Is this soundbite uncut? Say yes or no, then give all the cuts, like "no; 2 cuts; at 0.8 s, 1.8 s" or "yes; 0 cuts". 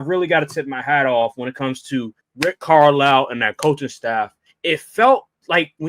no; 2 cuts; at 2.2 s, 4.4 s